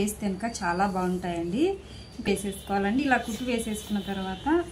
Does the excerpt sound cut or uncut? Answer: cut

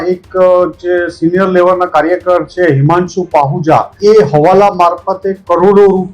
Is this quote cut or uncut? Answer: cut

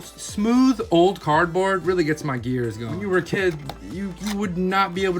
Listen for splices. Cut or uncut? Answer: cut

